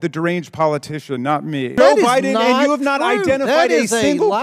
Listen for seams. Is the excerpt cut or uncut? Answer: cut